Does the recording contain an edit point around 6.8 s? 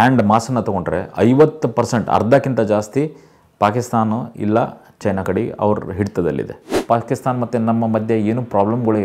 yes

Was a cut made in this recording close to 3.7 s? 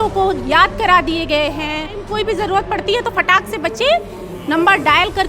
no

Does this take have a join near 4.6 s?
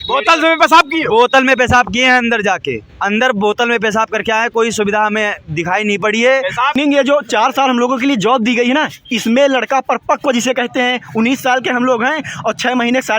no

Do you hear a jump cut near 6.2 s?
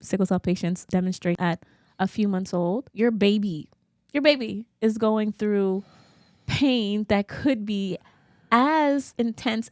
no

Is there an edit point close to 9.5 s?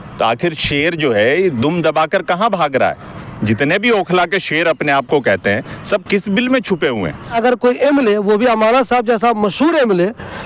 no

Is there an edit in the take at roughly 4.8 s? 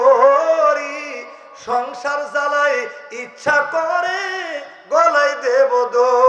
no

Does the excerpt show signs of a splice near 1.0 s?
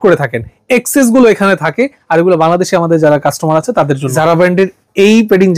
no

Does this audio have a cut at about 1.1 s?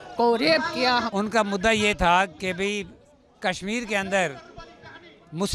yes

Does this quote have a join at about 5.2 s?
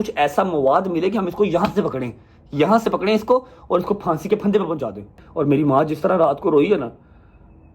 yes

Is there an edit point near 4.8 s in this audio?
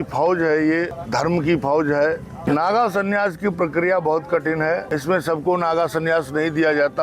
yes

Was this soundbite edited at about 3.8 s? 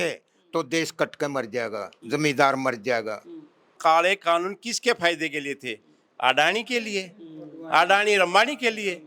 yes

